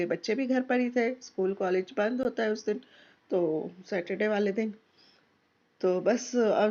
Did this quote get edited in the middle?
no; 0 cuts

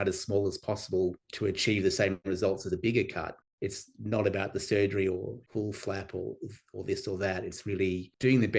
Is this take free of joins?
no; 1 cut; at 3.4 s

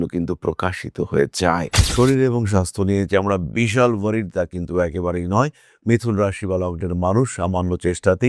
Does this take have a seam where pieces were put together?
yes; 1 cut; at 1.8 s

